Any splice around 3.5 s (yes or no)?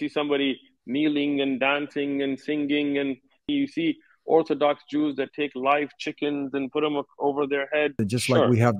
yes